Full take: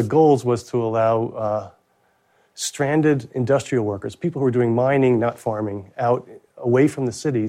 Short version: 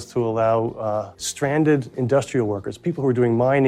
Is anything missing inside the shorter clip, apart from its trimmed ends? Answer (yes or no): yes